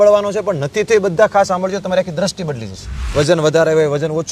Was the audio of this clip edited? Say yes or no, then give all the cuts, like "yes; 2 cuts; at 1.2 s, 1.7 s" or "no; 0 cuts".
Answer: yes; 1 cut; at 3.0 s